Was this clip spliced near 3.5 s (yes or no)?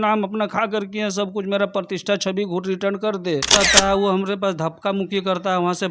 yes